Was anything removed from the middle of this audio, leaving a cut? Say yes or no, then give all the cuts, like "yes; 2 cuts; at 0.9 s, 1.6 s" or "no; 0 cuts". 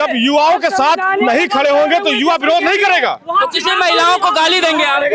no; 0 cuts